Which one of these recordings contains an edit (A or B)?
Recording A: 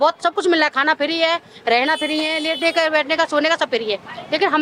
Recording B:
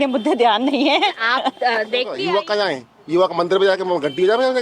B